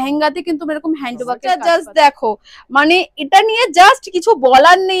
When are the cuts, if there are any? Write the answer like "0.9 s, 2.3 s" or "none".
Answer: 1.4 s